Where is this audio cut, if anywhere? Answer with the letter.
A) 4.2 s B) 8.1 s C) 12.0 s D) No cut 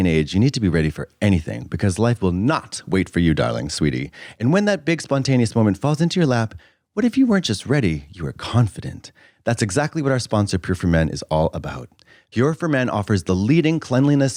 D